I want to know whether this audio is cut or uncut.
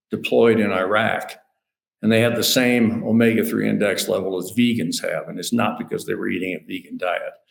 uncut